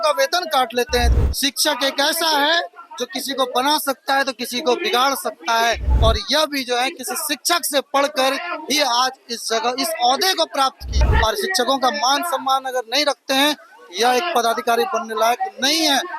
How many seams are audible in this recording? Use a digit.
2